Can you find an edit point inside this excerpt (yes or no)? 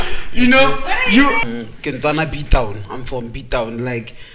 yes